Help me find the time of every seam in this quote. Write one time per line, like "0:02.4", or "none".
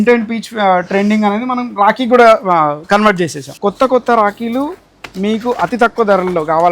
0:03.4